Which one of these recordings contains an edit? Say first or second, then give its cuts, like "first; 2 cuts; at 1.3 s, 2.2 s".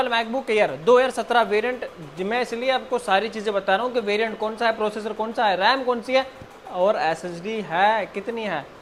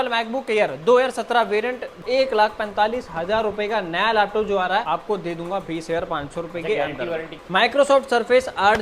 second; 3 cuts; at 2.0 s, 4.9 s, 7.3 s